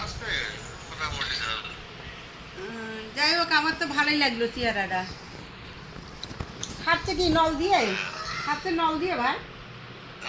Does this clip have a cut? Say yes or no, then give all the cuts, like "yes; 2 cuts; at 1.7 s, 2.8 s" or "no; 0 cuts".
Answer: no; 0 cuts